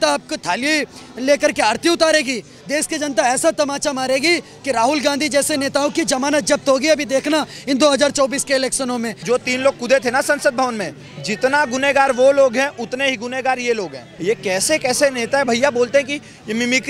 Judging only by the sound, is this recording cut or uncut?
cut